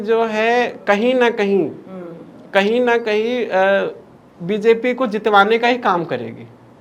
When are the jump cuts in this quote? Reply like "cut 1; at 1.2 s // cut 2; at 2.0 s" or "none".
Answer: none